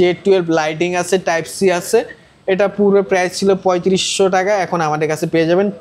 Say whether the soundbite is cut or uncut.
uncut